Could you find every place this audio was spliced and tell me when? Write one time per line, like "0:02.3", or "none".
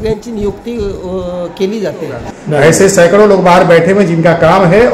0:02.3